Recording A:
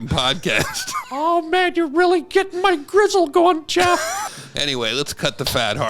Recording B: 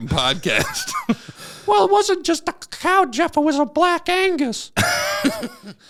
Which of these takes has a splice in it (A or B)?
A